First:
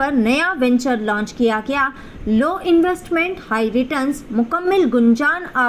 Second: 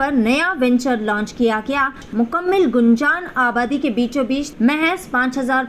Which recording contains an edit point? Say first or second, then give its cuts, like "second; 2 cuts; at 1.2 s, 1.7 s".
second; 2 cuts; at 2.0 s, 4.5 s